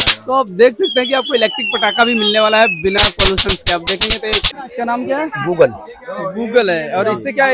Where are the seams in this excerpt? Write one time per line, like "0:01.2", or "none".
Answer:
0:04.5